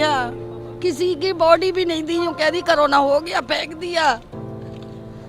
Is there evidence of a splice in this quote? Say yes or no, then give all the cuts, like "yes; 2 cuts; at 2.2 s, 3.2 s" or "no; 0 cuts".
no; 0 cuts